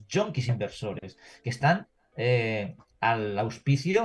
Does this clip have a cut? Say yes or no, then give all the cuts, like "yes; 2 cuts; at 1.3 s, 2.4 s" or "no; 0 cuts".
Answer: no; 0 cuts